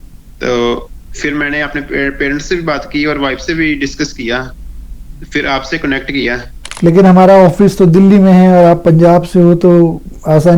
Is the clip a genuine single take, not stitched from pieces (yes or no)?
no